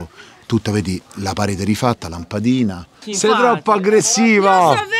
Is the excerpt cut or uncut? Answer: cut